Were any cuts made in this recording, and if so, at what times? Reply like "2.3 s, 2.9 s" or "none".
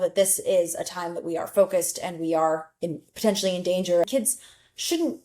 4.0 s